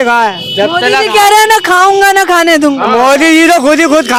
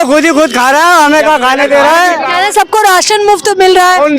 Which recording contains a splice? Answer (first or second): second